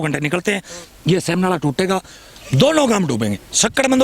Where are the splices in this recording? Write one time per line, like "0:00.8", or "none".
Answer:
none